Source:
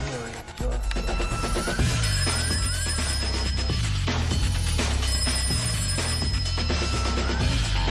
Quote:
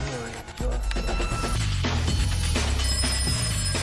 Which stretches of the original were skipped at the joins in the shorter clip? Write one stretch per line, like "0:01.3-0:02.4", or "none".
0:01.5-0:03.8

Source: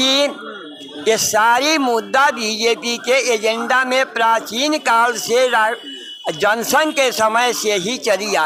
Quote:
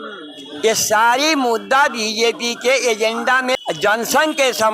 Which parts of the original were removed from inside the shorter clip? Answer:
0:04.0-0:06.1

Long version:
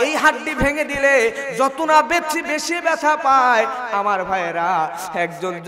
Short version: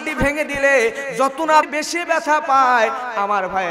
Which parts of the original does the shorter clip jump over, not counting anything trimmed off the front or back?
0:02.1-0:02.4

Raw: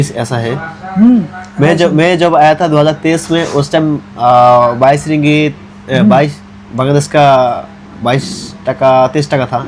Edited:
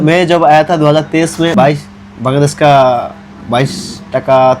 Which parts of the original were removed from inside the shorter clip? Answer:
0:03.5-0:06.1

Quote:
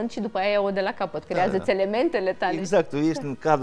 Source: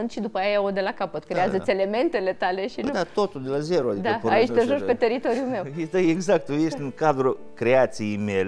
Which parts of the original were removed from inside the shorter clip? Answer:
0:02.6-0:06.2

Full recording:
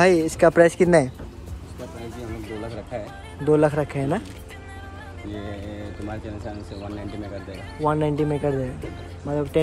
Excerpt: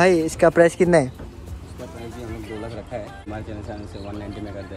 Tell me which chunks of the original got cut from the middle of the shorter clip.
0:03.2-0:06.0

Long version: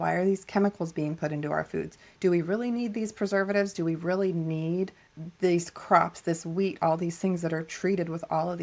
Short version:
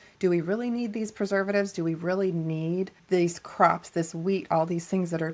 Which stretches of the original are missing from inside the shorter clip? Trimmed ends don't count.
0:05.0-0:05.3

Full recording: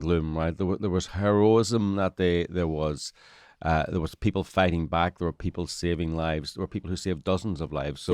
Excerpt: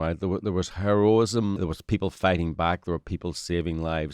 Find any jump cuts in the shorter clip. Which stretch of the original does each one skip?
0:01.9-0:03.9

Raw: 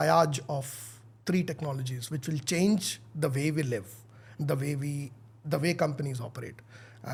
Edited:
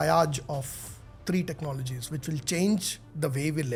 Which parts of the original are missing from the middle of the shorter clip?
none

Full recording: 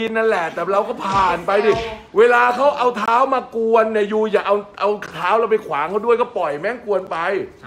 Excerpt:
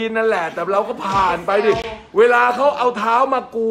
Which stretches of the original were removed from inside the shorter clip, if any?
none

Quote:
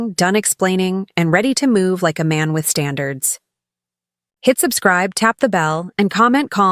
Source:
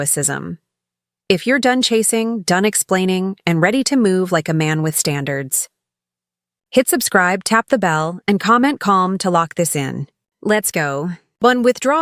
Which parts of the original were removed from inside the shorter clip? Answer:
none

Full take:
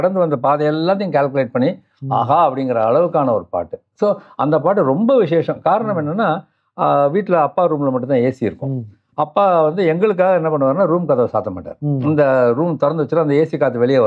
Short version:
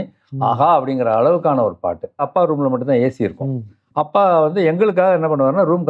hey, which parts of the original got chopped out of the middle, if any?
0:03.9-0:07.5

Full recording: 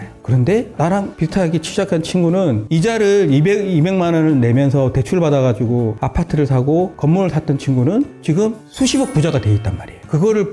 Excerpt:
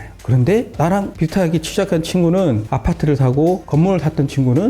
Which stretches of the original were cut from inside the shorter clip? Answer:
0:02.6-0:05.9

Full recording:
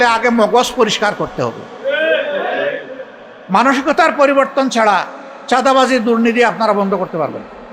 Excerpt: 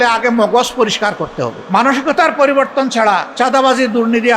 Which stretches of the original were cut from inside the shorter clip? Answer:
0:01.5-0:03.3
0:05.1-0:05.4

